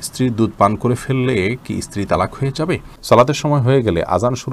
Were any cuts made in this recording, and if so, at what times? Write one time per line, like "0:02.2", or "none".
0:02.9